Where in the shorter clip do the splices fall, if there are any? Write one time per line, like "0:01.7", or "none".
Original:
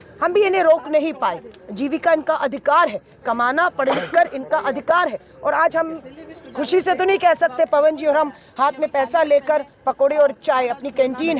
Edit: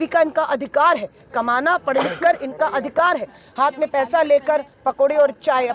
0:03.4